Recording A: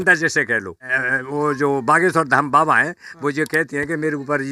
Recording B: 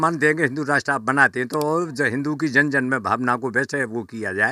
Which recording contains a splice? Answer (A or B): A